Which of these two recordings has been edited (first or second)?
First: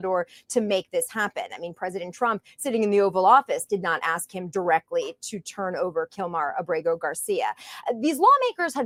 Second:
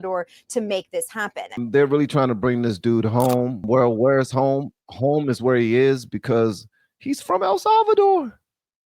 second